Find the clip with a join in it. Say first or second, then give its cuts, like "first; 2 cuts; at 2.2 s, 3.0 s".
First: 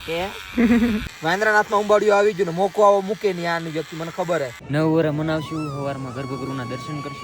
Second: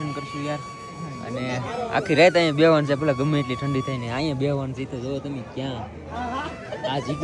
first; 2 cuts; at 1.1 s, 4.6 s